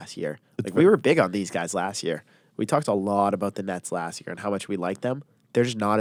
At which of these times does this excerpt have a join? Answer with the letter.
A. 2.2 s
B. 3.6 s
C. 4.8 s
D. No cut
D